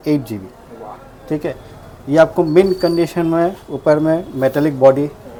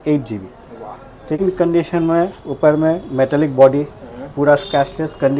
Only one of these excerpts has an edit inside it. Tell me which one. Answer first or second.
second